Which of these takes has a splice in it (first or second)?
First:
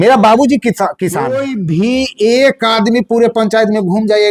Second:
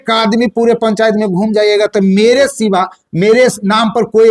first